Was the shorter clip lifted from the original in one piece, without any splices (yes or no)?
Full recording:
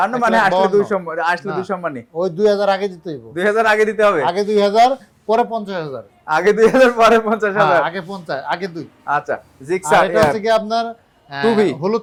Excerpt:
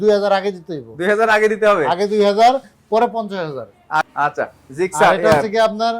no